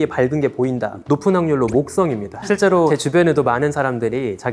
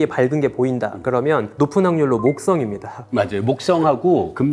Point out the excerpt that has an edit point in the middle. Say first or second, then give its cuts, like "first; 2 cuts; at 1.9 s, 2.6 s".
first; 2 cuts; at 1.0 s, 2.8 s